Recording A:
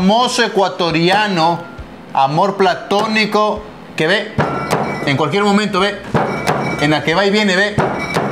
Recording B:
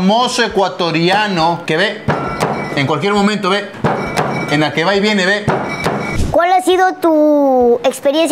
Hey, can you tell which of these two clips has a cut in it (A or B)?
B